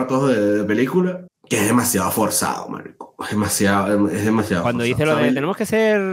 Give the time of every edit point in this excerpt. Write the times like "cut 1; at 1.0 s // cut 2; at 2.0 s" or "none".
cut 1; at 1.3 s